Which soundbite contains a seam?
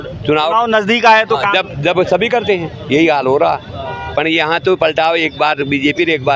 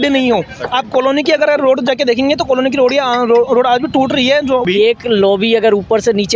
second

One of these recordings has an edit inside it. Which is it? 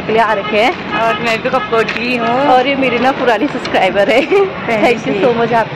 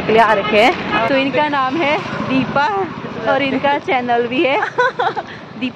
second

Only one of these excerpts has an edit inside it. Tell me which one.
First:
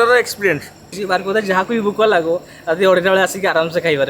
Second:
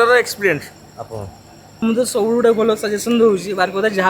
first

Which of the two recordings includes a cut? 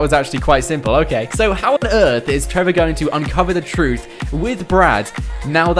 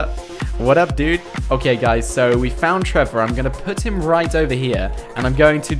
second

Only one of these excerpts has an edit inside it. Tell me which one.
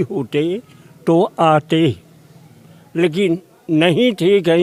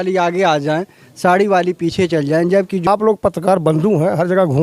second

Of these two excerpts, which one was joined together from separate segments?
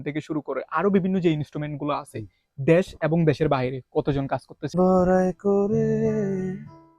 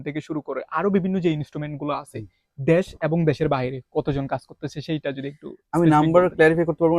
first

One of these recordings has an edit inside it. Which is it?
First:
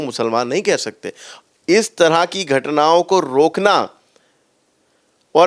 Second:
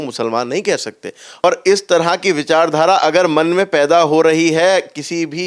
second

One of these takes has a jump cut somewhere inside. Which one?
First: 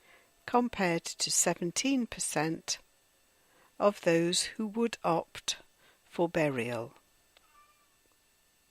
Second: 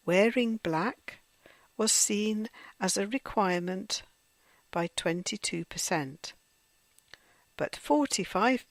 first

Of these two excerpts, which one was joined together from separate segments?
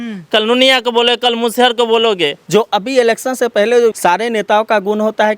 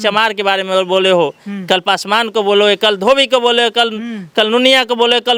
first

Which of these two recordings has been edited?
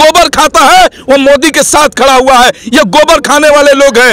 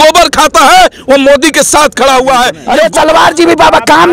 second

